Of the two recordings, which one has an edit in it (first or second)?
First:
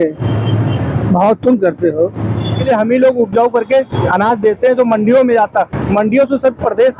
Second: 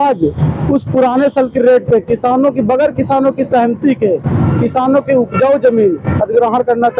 first